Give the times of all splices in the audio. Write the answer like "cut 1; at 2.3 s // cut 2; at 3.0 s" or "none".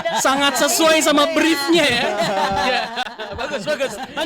none